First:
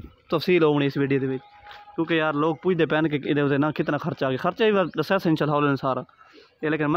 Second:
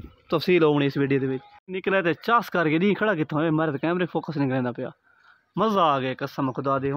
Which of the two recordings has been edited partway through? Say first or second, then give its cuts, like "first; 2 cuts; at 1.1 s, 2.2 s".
second; 1 cut; at 1.7 s